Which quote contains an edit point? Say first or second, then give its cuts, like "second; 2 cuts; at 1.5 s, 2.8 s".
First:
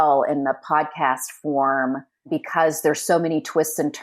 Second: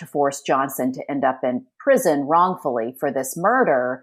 first; 1 cut; at 2.3 s